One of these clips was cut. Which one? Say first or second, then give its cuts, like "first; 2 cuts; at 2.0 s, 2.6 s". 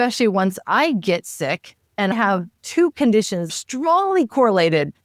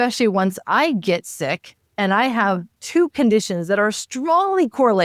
first; 2 cuts; at 2.1 s, 3.5 s